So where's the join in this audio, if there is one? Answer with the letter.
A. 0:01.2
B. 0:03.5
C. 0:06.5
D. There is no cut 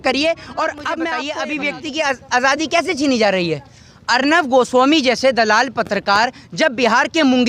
A